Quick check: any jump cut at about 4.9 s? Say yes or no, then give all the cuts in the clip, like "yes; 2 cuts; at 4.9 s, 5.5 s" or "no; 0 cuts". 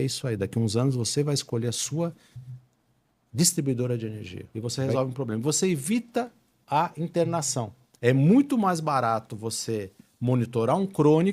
yes; 1 cut; at 4.9 s